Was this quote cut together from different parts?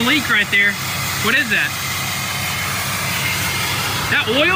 no; 0 cuts

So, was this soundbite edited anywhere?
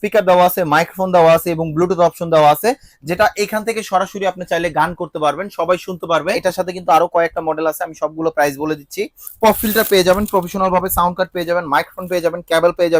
yes; 2 cuts; at 6.4 s, 9.2 s

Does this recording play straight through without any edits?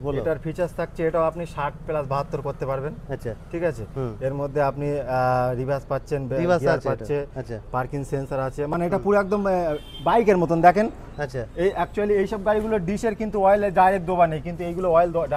yes; 0 cuts

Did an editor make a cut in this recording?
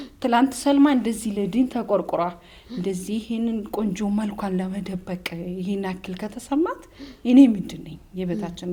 no; 0 cuts

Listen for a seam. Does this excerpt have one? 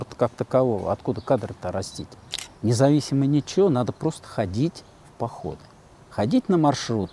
yes; 1 cut; at 2.4 s

